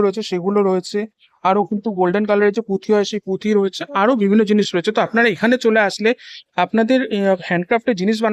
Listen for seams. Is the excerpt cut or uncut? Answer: uncut